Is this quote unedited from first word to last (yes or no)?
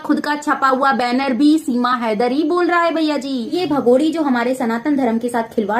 no